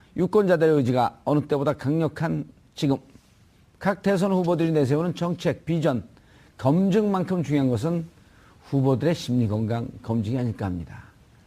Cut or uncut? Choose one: cut